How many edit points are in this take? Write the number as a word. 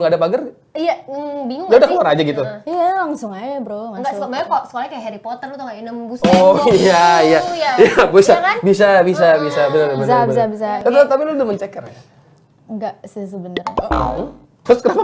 one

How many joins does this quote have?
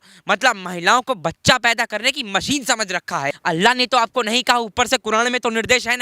one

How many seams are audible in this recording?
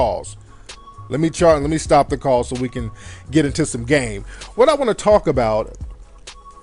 one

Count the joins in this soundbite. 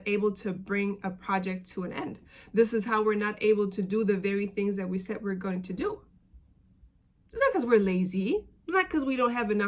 zero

